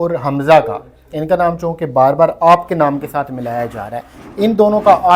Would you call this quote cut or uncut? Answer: uncut